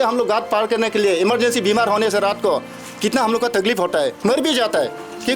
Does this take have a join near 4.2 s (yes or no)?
yes